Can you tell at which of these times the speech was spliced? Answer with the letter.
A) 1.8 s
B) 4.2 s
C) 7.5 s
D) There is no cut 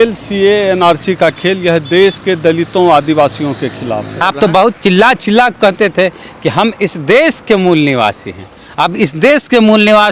B